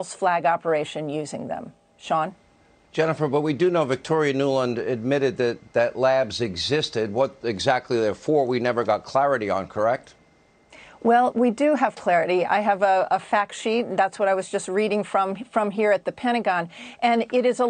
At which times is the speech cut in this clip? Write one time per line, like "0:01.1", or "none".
0:15.4